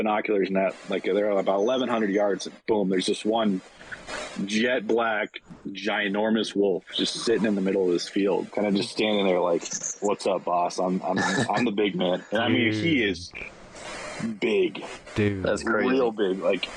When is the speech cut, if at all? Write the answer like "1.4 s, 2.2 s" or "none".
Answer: 8.5 s